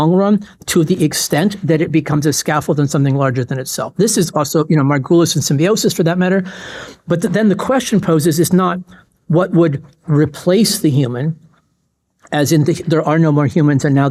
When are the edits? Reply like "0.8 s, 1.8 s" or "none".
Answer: none